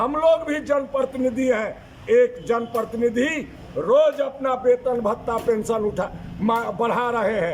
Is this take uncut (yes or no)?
yes